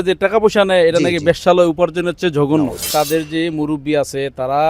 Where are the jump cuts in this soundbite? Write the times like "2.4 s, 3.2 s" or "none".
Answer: 2.9 s